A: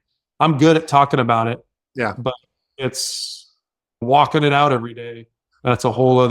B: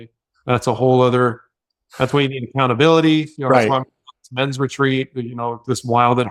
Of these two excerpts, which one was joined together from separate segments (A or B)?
A